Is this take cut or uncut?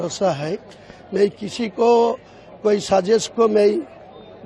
uncut